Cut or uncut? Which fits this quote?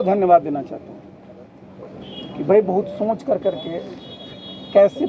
uncut